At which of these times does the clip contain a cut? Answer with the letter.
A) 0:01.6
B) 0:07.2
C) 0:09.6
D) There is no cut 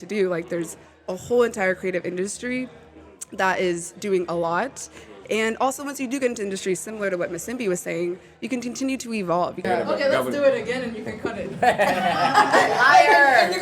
C